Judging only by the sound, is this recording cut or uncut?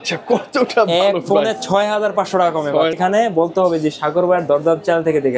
cut